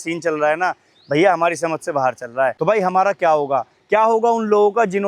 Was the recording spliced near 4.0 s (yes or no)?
no